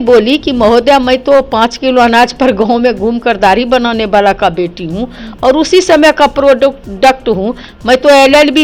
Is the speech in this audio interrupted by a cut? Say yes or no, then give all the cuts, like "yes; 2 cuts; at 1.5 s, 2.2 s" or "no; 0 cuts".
no; 0 cuts